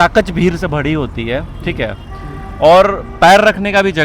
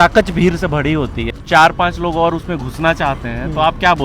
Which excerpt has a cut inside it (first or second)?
second